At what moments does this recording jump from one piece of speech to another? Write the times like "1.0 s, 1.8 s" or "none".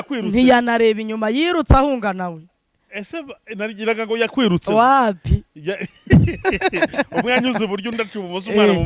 none